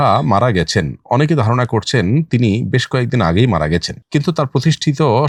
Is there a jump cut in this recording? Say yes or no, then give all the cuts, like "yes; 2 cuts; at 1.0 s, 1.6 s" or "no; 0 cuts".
no; 0 cuts